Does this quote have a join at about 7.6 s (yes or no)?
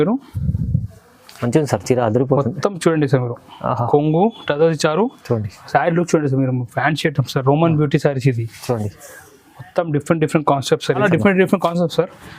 no